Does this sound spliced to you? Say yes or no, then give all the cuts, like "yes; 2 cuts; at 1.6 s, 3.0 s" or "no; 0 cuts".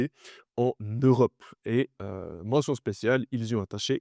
no; 0 cuts